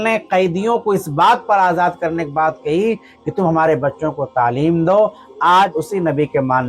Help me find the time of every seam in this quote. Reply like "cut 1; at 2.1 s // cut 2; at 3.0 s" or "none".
cut 1; at 5.8 s